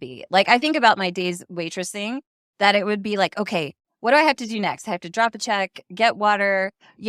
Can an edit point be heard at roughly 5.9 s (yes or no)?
no